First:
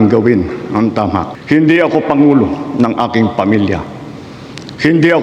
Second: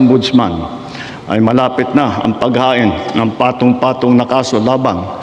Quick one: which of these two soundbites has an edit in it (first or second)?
first